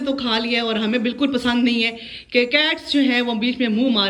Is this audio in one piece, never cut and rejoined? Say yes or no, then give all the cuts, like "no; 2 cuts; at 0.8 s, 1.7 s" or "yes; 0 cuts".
yes; 0 cuts